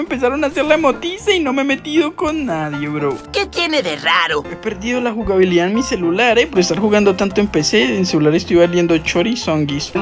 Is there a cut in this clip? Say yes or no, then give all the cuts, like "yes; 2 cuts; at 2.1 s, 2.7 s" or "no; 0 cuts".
yes; 1 cut; at 4.5 s